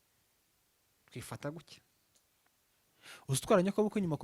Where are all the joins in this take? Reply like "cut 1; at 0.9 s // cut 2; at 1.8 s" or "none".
cut 1; at 2.8 s